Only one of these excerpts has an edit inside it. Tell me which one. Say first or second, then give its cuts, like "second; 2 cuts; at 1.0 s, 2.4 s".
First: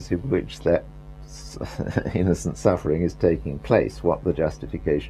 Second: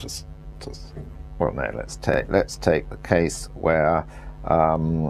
first; 1 cut; at 2.9 s